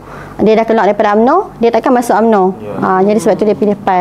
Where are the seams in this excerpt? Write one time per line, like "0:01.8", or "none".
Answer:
none

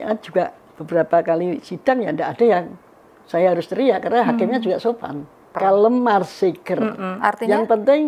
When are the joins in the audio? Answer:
0:05.6

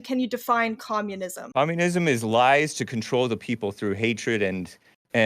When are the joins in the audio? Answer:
0:01.4

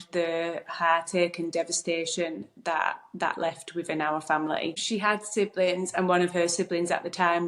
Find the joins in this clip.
none

